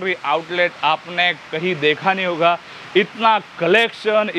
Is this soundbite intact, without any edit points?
yes; 0 cuts

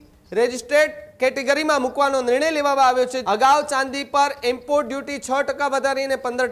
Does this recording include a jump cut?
yes; 1 cut; at 3.2 s

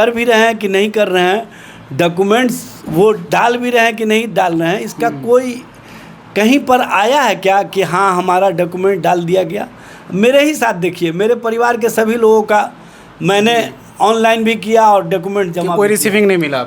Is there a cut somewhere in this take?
no; 0 cuts

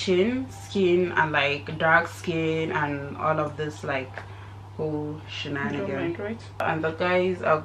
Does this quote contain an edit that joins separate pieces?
yes; 1 cut; at 6.6 s

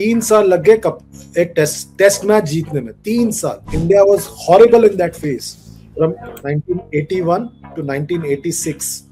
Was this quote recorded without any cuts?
yes; 0 cuts

